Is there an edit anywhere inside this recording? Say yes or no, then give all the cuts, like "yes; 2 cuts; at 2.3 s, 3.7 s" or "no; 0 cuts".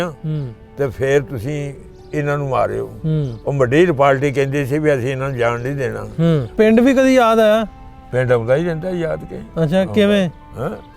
yes; 1 cut; at 6.5 s